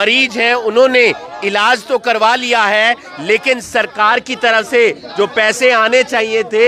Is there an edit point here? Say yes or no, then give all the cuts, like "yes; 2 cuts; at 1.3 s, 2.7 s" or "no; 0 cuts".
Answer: no; 0 cuts